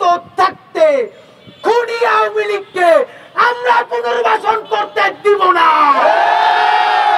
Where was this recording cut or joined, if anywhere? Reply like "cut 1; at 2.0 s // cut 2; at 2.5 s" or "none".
none